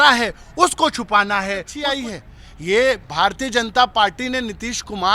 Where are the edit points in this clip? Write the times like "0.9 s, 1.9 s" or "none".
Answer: 1.8 s